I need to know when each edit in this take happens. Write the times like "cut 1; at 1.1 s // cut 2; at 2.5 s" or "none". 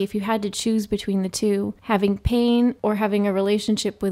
cut 1; at 1.8 s // cut 2; at 2.8 s